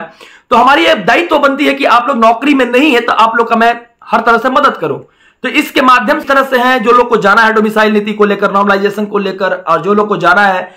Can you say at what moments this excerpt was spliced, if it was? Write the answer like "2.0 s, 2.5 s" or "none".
6.2 s